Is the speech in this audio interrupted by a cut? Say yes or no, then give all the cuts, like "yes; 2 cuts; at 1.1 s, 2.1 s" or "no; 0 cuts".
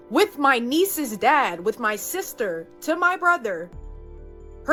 no; 0 cuts